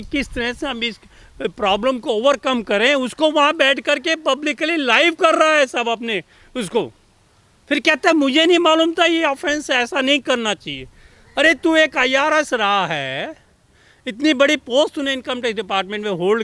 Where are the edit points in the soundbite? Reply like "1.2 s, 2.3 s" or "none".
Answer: none